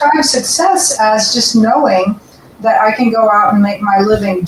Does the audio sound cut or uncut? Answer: uncut